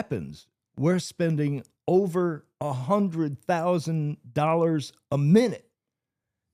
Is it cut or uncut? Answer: uncut